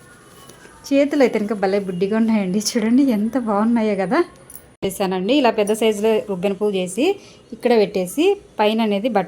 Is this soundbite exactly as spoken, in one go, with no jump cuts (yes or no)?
no